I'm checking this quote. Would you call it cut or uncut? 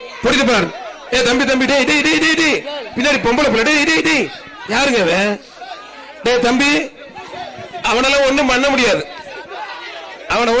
uncut